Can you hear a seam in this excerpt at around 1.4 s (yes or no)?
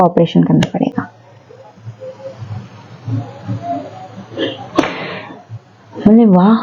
no